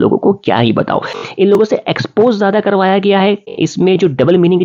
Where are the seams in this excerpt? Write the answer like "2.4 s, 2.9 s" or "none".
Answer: 1.2 s, 3.5 s